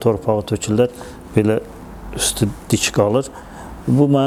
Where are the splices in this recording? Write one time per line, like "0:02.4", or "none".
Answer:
none